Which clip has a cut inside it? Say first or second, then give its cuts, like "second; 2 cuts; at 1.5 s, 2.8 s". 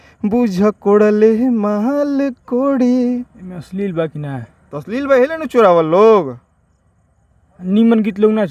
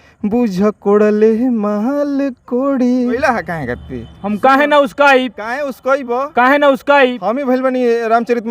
second; 1 cut; at 3.1 s